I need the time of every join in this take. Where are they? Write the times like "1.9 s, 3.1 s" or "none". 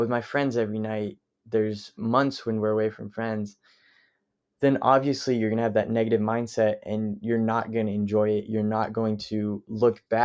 none